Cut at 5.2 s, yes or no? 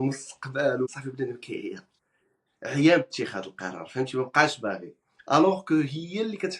no